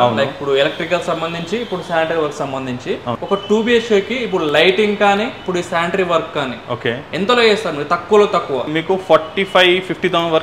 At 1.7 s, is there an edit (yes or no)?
no